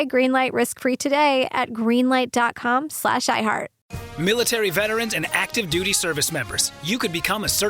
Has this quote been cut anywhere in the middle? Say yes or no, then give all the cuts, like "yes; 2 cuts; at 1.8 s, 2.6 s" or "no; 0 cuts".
yes; 1 cut; at 4.0 s